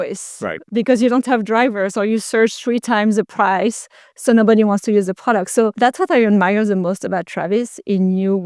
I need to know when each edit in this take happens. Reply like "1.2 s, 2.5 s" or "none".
5.7 s